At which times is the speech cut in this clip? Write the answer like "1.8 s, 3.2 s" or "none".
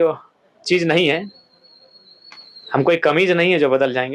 none